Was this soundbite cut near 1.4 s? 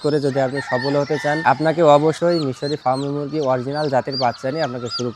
yes; 2 cuts; at 1.4 s, 2.2 s

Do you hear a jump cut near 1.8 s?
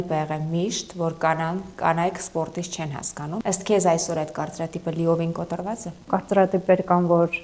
no; 2 cuts; at 3.4 s, 6.1 s

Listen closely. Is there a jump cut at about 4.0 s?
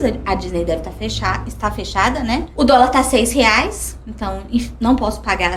no; 1 cut; at 2.5 s

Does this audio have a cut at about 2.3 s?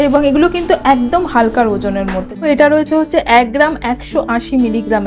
yes; 1 cut; at 2.3 s

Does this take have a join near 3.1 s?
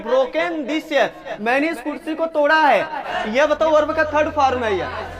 yes; 1 cut; at 3.1 s

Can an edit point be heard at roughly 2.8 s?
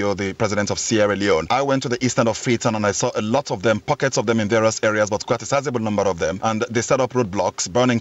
no; 2 cuts; at 1.5 s, 6.4 s

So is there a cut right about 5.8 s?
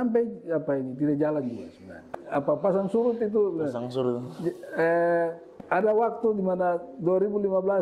yes; 2 cuts; at 2.2 s, 5.8 s

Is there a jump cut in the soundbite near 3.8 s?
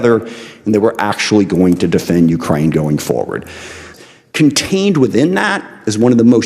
yes; 1 cut; at 3.8 s

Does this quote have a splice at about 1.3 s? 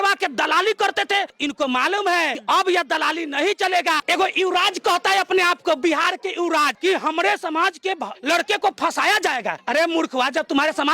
yes; 4 cuts; at 1.3 s, 2.4 s, 4.0 s, 6.7 s

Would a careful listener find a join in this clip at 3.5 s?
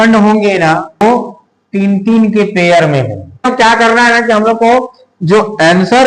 yes; 2 cuts; at 1.0 s, 3.5 s

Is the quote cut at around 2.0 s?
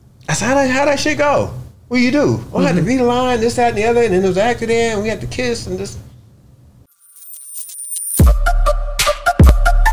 no; 1 cut; at 7.0 s

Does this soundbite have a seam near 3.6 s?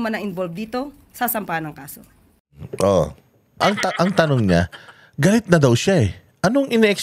yes; 1 cut; at 3.6 s

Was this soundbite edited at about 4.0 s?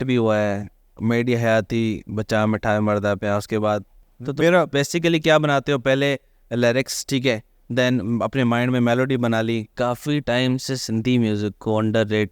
yes; 2 cuts; at 4.0 s, 9.7 s

